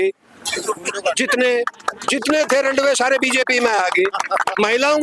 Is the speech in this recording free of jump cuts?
yes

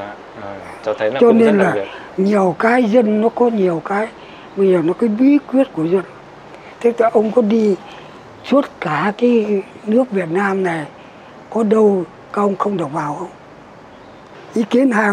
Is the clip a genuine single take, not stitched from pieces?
no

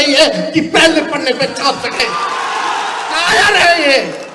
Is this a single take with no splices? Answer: no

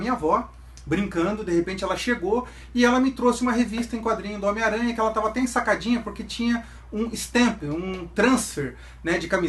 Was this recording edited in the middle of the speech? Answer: yes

